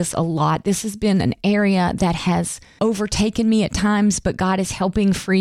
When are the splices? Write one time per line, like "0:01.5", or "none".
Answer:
0:02.8